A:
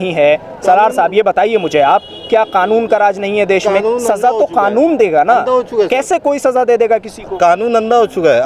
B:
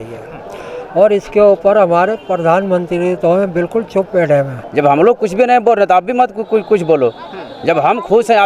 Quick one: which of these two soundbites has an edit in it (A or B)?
B